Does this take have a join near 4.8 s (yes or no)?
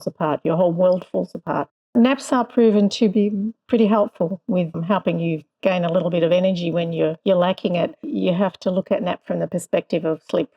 yes